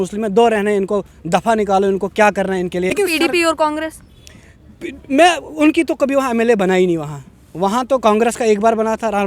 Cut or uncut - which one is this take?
cut